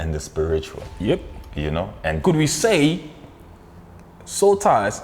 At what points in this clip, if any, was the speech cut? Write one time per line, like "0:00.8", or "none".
0:02.2